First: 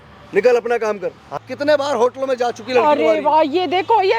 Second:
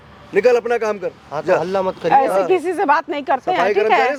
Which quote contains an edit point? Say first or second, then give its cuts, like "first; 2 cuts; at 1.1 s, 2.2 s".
first; 1 cut; at 1.4 s